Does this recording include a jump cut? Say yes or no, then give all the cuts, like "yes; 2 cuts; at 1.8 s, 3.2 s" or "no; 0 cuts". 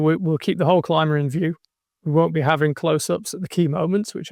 no; 0 cuts